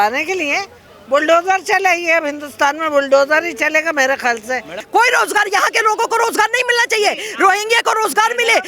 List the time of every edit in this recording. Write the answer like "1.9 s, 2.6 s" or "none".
4.8 s